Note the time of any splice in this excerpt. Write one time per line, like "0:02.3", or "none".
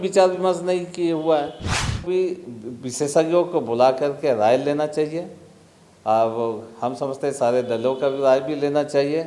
0:02.0